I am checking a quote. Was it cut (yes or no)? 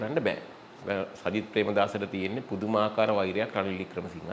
no